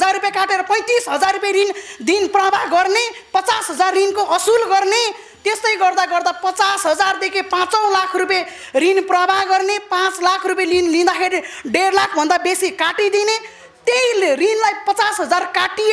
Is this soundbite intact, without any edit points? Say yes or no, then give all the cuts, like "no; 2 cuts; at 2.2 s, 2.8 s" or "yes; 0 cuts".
yes; 0 cuts